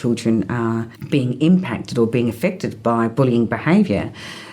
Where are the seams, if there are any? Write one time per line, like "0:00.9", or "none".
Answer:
0:00.9